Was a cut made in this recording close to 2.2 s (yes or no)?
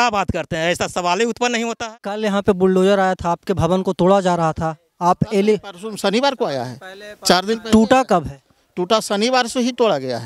yes